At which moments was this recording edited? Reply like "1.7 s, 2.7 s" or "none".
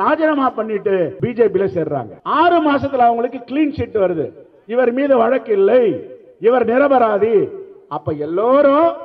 1.2 s, 2.1 s